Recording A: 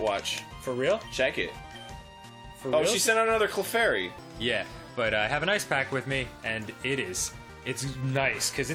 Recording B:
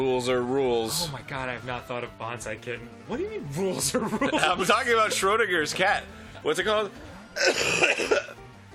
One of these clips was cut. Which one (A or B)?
A